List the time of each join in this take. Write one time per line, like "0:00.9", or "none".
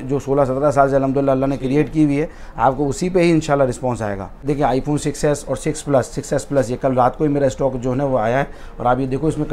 0:04.5